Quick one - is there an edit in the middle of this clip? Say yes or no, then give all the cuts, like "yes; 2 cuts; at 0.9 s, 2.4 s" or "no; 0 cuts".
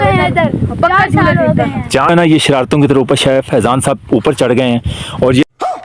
yes; 1 cut; at 2.1 s